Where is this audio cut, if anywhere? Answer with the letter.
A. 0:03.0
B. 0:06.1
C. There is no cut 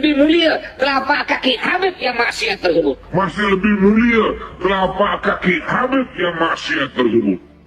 A